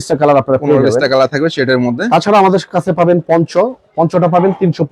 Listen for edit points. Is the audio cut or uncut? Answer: uncut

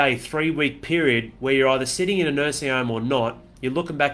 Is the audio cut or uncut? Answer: uncut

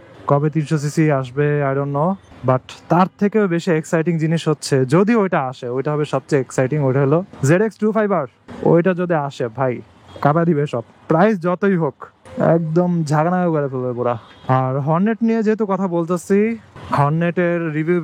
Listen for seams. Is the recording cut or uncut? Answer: uncut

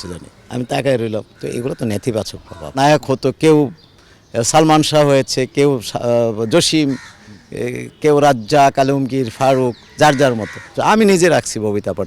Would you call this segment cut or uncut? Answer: cut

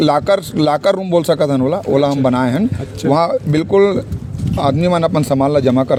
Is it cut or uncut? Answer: uncut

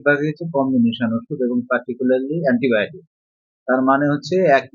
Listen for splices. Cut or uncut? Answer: uncut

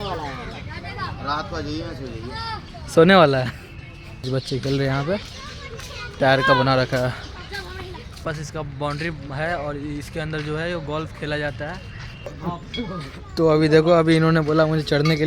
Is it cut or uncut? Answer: cut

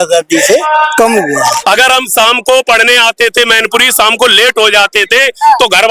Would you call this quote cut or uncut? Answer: cut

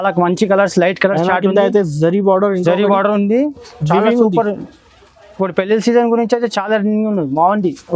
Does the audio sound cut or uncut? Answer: uncut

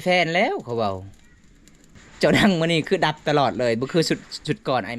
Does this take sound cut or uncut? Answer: cut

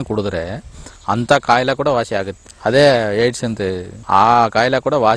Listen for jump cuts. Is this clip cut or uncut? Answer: cut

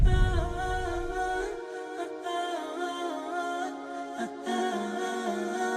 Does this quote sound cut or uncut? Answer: uncut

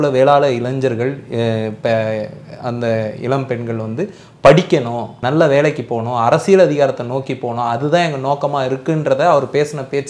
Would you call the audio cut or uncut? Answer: cut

